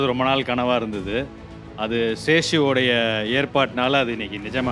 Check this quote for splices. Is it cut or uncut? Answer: uncut